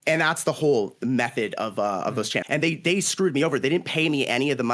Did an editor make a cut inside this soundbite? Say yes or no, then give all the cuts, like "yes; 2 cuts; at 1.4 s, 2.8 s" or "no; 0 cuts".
yes; 1 cut; at 2.4 s